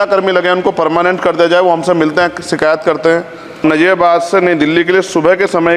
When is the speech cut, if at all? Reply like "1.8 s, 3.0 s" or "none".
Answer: 3.6 s